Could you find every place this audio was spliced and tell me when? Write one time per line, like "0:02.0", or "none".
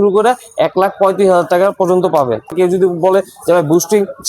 0:02.5